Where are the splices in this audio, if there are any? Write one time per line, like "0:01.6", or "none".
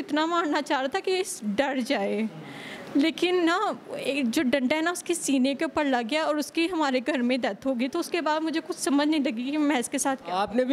none